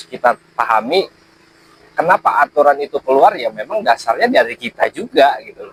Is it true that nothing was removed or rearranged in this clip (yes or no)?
yes